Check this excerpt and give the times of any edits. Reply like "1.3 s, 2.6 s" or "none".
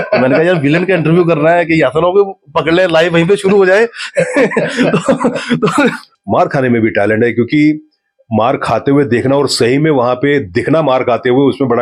6.1 s